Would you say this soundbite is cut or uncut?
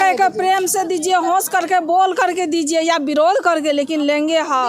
uncut